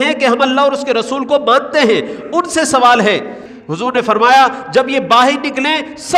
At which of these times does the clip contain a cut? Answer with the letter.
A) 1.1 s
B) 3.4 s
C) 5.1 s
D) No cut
B